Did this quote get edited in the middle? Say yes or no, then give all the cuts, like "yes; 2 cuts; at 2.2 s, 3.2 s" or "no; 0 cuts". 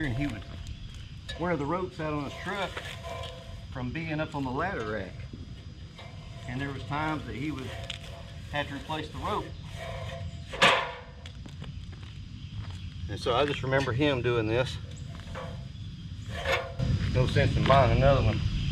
no; 0 cuts